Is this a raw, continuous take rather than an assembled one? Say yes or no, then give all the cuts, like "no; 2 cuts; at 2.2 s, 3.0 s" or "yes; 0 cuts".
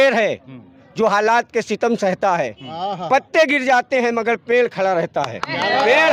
yes; 0 cuts